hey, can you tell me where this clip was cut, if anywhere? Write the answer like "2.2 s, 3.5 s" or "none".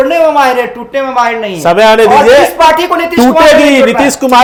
none